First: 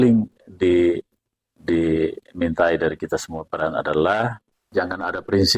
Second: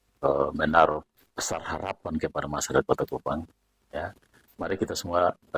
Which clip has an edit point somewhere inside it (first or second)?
first